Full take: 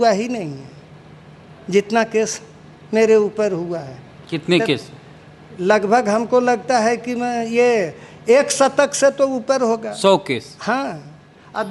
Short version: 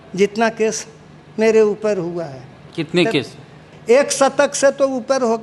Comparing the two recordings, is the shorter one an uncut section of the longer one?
no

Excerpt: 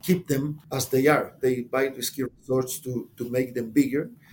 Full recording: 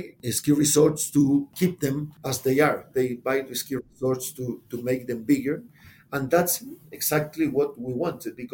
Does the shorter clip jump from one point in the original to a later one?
no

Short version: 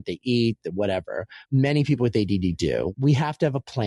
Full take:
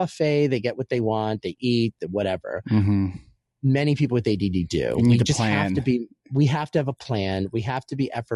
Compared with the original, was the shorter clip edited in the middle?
yes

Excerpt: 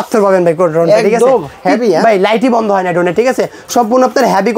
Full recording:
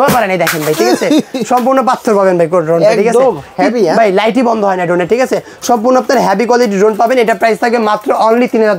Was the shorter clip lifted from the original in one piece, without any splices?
yes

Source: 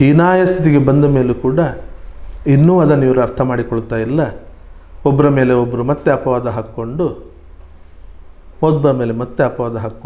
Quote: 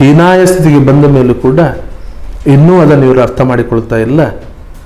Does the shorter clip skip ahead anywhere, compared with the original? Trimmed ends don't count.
no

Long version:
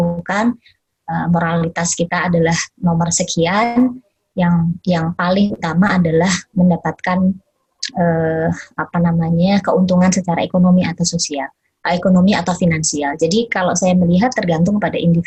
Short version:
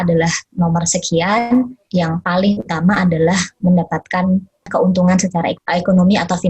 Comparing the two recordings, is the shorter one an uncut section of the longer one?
no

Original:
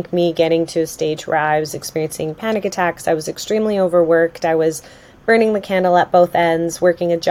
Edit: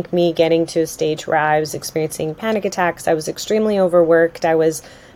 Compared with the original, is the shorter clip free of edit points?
yes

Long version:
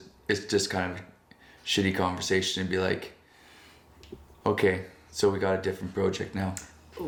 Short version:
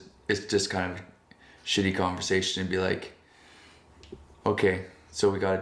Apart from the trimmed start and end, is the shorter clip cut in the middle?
no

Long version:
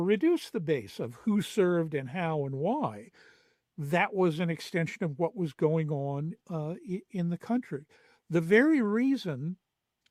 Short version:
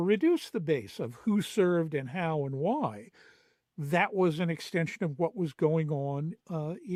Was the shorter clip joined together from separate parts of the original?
no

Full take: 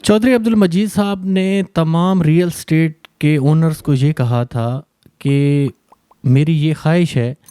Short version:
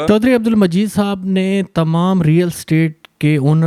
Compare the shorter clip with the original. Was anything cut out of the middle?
no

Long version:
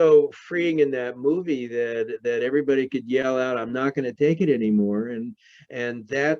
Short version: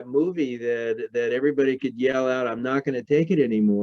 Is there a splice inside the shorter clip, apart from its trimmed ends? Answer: no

